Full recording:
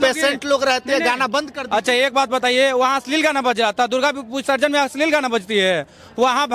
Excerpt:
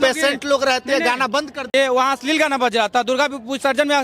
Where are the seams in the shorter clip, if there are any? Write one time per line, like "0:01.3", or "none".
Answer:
0:01.7